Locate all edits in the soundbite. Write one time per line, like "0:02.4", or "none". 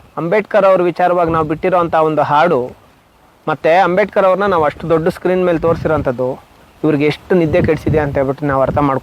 none